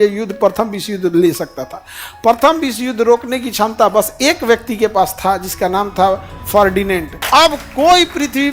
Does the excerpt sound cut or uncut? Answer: cut